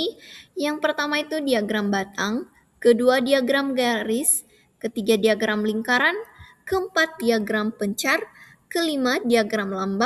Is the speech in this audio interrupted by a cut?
no; 0 cuts

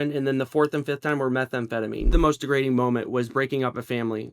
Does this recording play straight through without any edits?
no; 1 cut; at 2.1 s

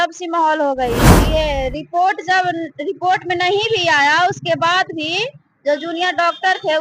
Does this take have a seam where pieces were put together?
yes; 1 cut; at 1.1 s

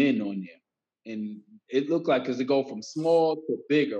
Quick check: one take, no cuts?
yes; 0 cuts

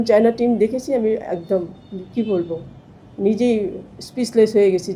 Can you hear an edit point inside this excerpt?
no; 0 cuts

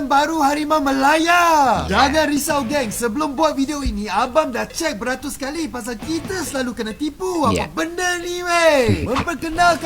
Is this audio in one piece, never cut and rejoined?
yes; 0 cuts

